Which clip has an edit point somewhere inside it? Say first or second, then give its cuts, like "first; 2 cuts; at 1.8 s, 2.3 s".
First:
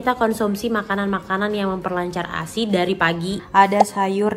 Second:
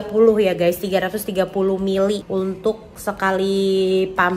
first; 1 cut; at 3.4 s